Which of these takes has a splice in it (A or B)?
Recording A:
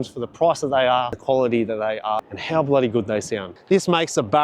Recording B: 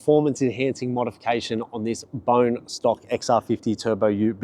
A